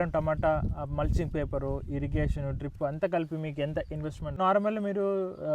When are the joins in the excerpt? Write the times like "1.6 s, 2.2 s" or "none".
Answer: 4.2 s